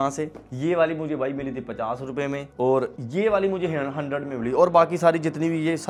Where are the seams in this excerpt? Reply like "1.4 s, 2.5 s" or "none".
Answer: none